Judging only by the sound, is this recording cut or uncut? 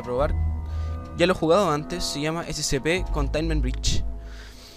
cut